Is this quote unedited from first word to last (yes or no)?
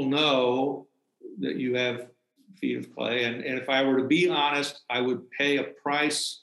yes